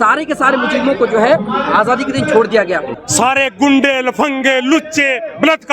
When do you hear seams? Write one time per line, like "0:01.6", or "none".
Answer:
0:02.9